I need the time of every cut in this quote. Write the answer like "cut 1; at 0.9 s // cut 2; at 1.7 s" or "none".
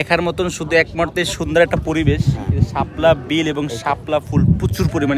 none